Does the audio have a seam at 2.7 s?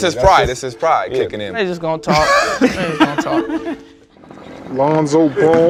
no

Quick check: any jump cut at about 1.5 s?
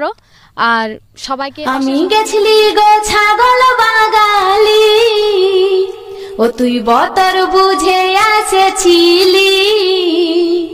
yes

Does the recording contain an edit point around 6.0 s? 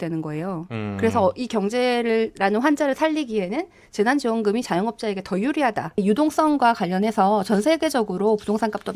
yes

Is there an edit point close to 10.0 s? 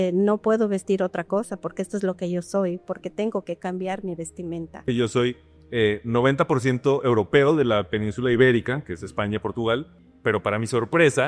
yes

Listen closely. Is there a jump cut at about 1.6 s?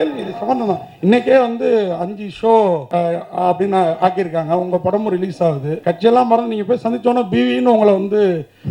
no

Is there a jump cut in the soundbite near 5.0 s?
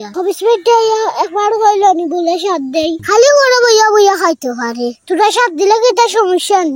no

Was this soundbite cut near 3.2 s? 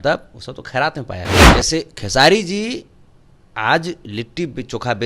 no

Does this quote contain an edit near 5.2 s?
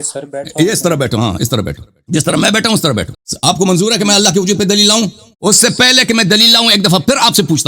yes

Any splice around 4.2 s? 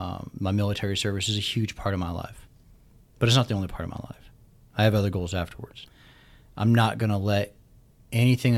no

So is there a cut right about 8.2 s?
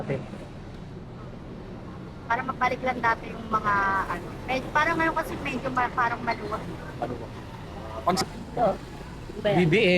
yes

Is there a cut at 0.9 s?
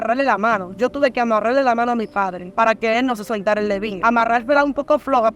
no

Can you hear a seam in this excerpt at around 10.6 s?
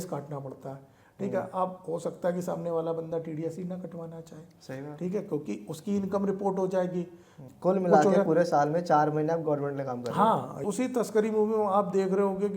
yes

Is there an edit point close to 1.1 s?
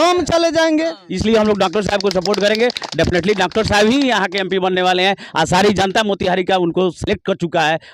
yes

